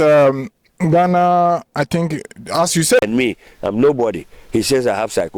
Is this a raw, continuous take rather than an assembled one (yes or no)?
no